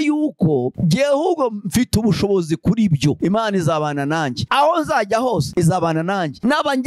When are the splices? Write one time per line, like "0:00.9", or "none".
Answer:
0:03.2
0:04.4